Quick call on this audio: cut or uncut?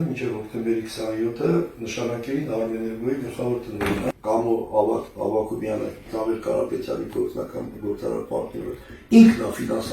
cut